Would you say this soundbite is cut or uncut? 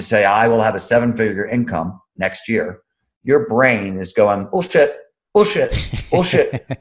uncut